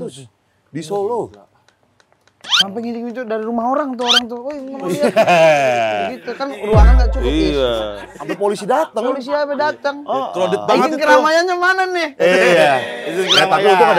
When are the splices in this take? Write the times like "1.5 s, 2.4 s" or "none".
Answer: 8.1 s